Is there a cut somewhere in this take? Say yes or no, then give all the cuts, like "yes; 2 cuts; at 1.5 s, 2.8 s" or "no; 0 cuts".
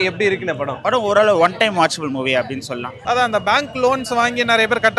yes; 1 cut; at 2.9 s